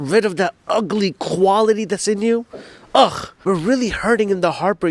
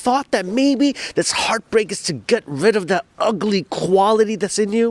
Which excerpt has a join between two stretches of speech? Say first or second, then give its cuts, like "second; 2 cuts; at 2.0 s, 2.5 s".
first; 1 cut; at 3.3 s